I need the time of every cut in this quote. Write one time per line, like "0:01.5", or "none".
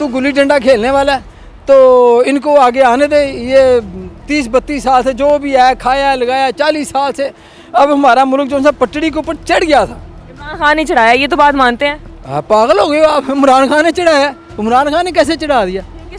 none

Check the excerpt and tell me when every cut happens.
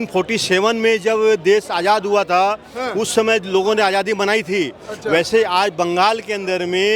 none

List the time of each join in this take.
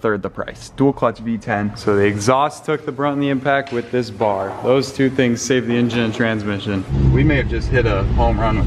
0:01.7
0:06.9

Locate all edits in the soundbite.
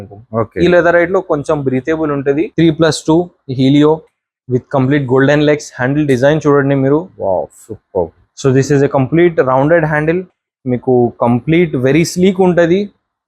0:02.5

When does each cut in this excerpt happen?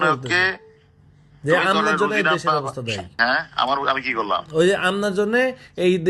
0:03.1

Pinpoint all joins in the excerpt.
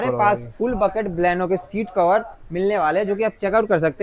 none

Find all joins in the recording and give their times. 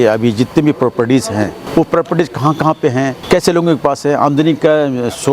0:01.6
0:03.2

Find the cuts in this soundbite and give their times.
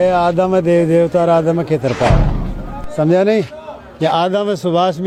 none

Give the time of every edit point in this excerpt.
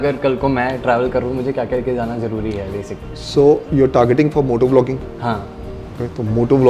none

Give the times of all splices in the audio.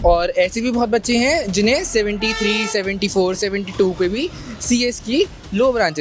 none

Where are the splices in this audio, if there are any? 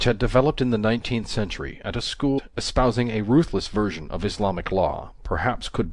none

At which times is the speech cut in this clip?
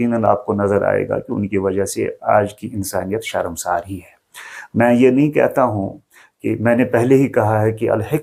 none

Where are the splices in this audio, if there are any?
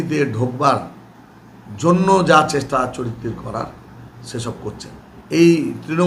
0:05.1

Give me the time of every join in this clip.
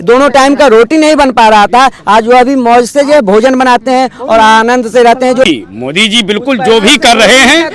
0:05.4

